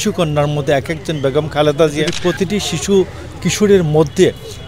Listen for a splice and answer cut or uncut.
cut